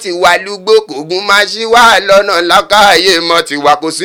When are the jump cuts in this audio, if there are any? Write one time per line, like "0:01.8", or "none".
none